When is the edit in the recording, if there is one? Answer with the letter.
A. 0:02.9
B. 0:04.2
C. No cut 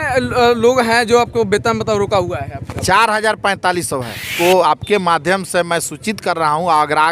B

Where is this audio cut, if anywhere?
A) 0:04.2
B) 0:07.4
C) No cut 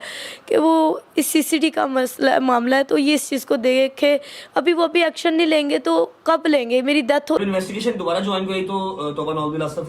B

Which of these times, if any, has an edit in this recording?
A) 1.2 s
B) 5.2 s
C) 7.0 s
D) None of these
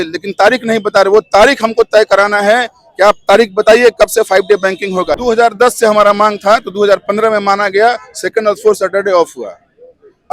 B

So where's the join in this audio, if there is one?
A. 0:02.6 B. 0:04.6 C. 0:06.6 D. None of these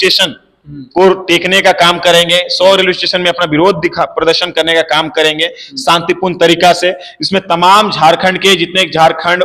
D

